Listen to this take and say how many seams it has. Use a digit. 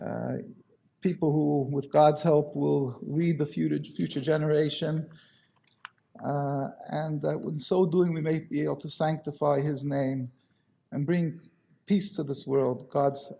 1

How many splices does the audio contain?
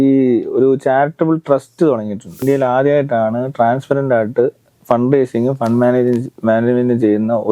1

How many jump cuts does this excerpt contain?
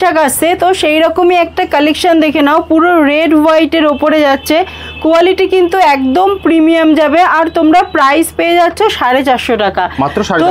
0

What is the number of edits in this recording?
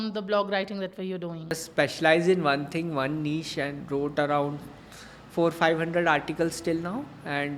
1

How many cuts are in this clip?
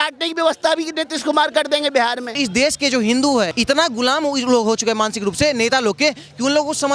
2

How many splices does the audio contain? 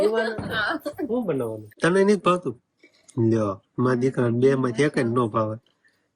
1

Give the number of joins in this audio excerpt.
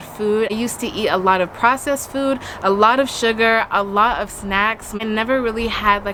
0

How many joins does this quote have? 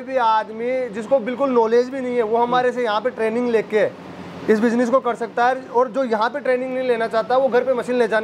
0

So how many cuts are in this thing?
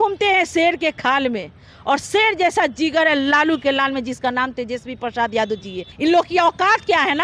1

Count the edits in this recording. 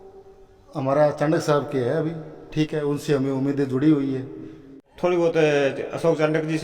1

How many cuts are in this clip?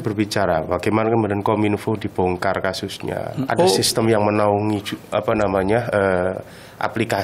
1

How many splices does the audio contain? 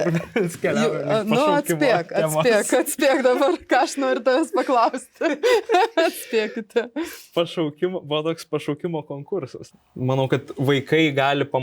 1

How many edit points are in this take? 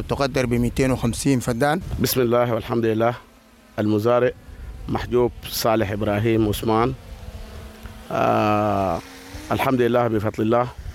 1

